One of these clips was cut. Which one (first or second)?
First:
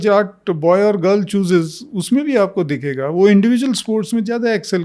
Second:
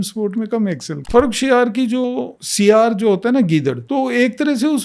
second